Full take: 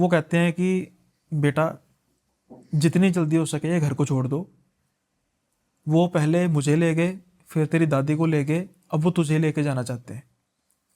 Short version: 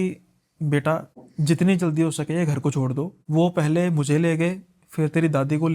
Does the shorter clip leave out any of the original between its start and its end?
yes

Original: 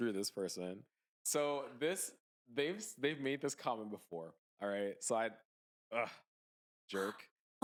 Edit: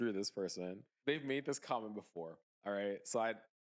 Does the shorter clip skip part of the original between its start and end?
yes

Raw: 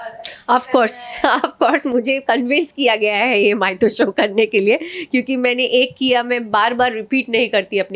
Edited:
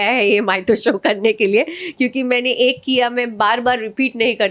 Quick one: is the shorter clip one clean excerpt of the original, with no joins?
yes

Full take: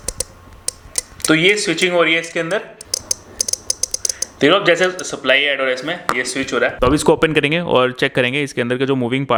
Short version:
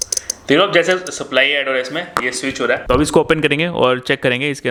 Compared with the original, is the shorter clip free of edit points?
yes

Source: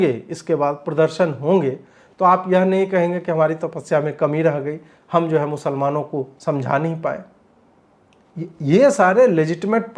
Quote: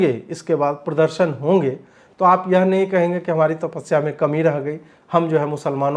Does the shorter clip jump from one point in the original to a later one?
no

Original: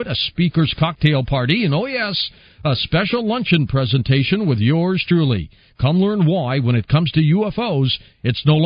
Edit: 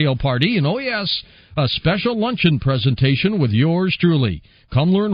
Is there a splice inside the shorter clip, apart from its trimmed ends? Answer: no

